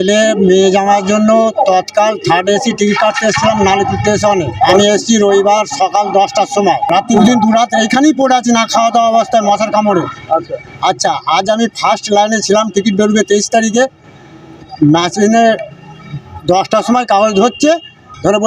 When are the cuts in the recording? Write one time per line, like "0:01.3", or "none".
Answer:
0:04.7
0:07.2